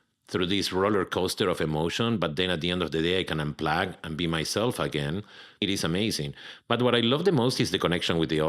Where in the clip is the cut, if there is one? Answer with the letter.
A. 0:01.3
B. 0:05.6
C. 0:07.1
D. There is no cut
B